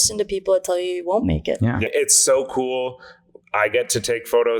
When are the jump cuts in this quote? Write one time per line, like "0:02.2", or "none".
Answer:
0:01.9